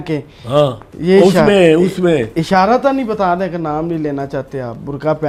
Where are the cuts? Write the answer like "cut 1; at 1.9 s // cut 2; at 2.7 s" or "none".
none